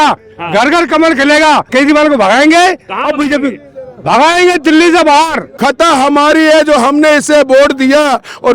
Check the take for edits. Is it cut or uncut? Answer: cut